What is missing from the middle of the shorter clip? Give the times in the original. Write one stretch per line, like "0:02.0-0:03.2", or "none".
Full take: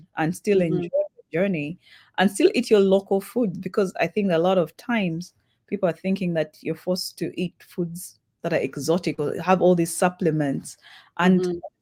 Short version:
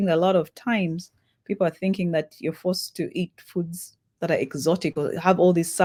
none